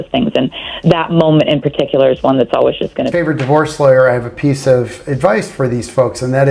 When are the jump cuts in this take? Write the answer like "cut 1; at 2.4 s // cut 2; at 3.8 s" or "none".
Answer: cut 1; at 3.1 s